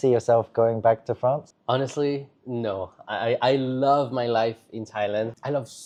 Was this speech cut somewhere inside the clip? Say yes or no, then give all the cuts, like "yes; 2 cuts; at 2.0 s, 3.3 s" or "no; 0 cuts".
no; 0 cuts